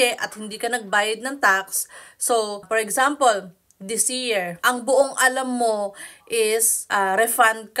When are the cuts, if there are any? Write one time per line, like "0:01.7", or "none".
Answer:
0:02.6
0:04.6
0:06.8